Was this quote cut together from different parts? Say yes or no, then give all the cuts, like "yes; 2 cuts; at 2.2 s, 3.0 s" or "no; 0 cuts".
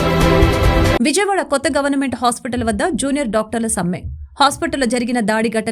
yes; 1 cut; at 0.9 s